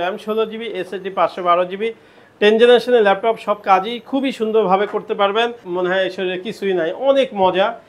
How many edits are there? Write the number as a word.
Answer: one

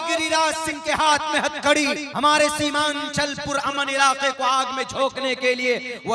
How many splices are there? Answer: one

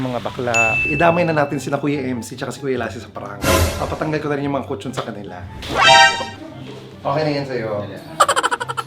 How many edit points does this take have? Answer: two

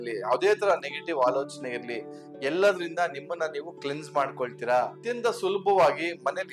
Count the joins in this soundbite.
one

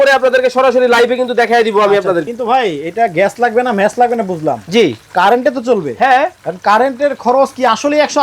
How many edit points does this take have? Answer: one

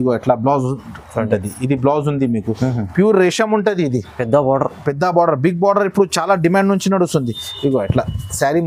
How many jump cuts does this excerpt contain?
zero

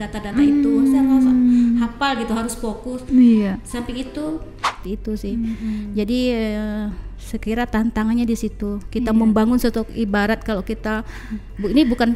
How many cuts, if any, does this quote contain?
one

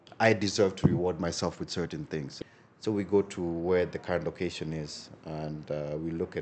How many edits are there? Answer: one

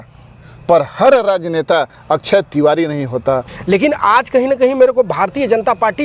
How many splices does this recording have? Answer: one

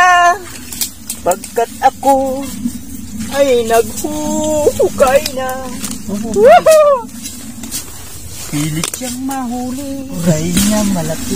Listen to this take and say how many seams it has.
one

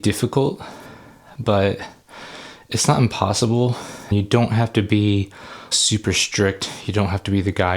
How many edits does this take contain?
two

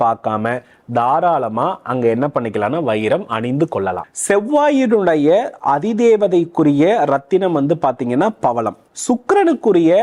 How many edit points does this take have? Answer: two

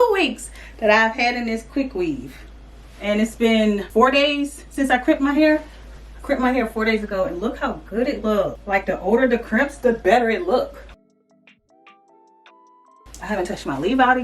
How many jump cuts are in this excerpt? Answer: zero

